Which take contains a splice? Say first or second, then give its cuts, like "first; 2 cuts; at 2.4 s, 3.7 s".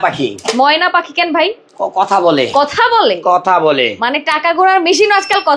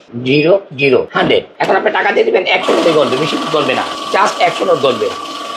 second; 2 cuts; at 1.3 s, 3.9 s